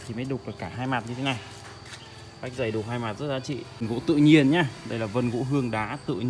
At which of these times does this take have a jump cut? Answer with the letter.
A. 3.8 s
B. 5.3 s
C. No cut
A